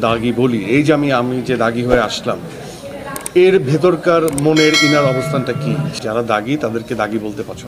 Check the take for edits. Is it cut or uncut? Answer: cut